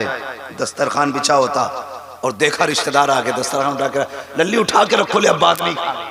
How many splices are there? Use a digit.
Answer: 0